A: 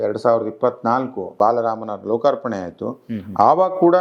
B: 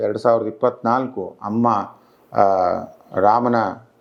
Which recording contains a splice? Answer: A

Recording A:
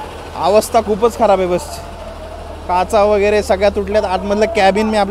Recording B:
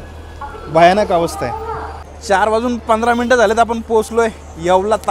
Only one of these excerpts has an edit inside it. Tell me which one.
B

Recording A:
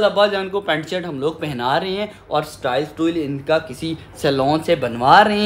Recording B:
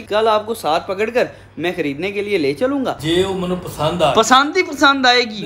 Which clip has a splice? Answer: B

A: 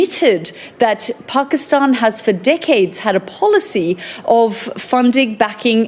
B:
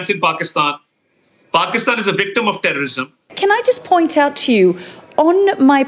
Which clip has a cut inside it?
B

